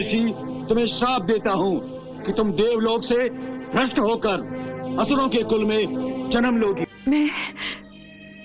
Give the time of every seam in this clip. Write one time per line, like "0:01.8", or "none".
0:06.8